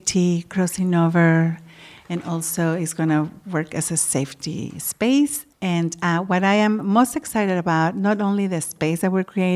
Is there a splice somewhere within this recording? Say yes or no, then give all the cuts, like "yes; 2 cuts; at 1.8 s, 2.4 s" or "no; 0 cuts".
yes; 1 cut; at 5.4 s